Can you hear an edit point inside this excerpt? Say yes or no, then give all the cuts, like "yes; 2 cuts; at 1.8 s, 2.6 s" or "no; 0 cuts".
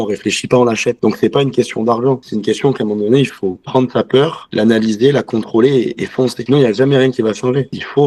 no; 0 cuts